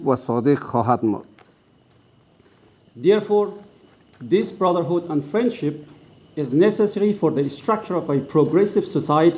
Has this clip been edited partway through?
no; 0 cuts

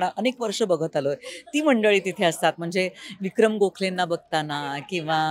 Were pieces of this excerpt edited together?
no; 0 cuts

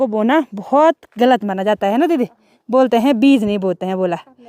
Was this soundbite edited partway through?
no; 0 cuts

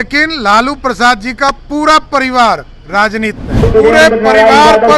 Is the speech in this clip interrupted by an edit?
yes; 1 cut; at 3.6 s

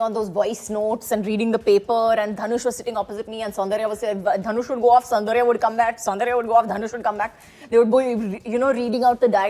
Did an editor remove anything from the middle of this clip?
no; 0 cuts

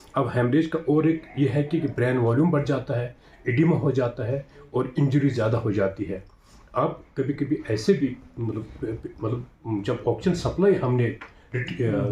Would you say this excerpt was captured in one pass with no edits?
yes; 0 cuts

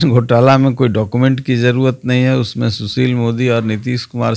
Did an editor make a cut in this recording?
no; 0 cuts

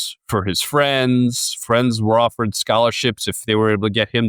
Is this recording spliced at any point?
no; 0 cuts

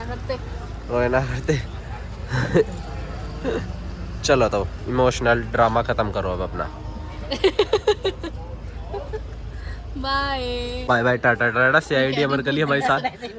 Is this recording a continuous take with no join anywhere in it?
no; 1 cut; at 10.9 s

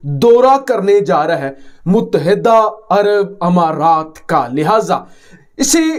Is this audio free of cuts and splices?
yes; 0 cuts

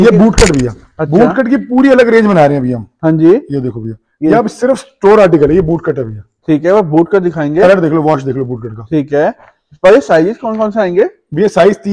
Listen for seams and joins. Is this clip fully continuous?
yes; 0 cuts

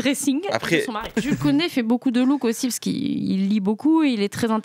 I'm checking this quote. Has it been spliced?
yes; 1 cut; at 1.1 s

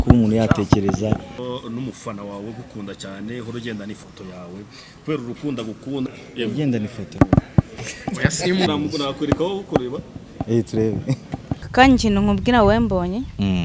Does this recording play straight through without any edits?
no; 5 cuts; at 1.4 s, 6.1 s, 7.0 s, 8.7 s, 11.6 s

